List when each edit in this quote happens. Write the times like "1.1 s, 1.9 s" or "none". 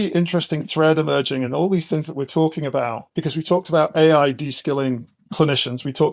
3.1 s, 5.1 s